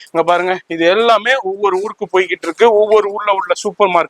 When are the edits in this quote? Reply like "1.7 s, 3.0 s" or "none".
none